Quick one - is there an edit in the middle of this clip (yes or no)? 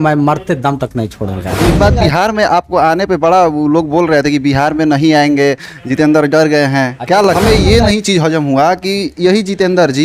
yes